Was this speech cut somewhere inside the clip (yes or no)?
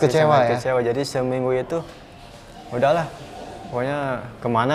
no